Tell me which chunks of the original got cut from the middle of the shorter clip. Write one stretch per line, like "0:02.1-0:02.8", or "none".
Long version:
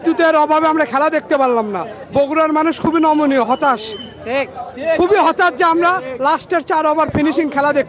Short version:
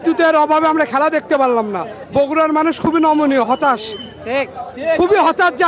none